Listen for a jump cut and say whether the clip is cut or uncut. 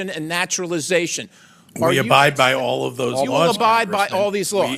uncut